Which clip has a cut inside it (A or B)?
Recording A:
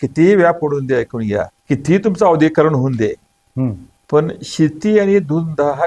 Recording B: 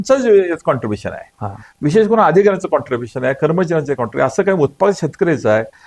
A